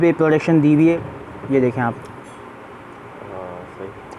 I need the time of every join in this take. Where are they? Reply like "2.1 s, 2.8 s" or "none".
0.9 s